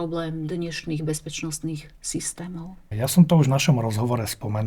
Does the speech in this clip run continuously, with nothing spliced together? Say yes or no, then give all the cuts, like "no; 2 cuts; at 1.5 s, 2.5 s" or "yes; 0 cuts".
yes; 0 cuts